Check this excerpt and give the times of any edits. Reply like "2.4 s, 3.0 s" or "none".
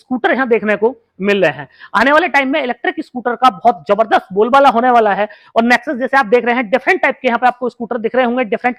none